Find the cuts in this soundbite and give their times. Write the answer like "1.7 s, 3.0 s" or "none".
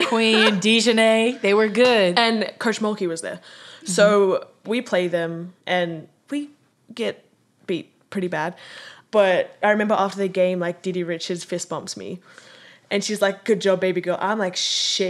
6.2 s, 9.6 s